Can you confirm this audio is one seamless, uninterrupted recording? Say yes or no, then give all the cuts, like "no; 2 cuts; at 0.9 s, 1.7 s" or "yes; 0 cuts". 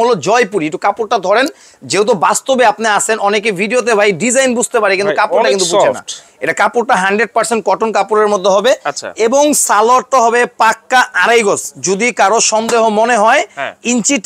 yes; 0 cuts